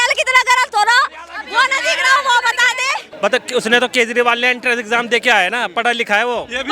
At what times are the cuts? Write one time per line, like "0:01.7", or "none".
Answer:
0:03.0